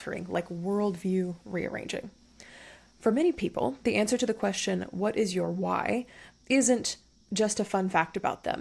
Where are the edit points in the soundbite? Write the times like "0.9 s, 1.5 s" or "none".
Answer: none